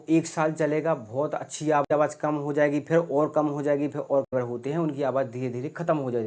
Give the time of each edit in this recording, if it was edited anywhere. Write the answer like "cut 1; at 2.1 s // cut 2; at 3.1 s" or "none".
cut 1; at 1.8 s // cut 2; at 4.3 s